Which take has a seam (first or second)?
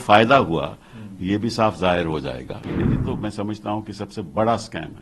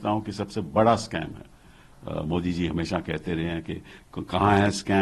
first